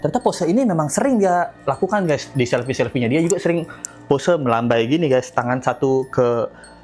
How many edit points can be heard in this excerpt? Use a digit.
0